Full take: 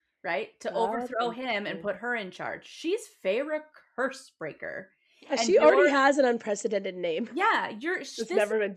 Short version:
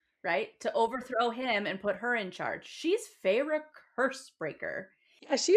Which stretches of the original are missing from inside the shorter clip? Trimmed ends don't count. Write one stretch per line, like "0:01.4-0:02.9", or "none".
none